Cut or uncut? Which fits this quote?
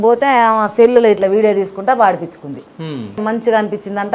cut